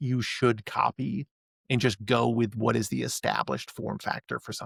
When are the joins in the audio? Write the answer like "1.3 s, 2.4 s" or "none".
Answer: none